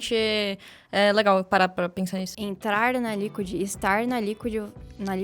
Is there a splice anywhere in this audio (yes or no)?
yes